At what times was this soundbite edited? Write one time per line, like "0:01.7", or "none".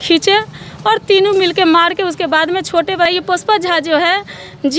0:03.1